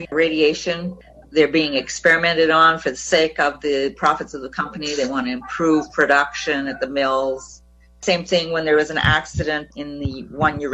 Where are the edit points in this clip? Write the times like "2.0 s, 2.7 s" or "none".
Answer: none